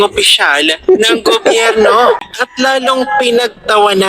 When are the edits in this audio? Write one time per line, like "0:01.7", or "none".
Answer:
0:02.2